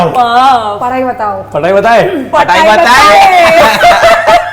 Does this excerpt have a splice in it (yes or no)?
no